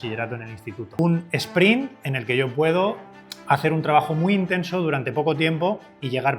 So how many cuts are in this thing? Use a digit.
1